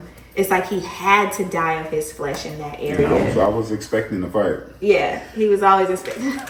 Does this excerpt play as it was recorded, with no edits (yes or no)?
yes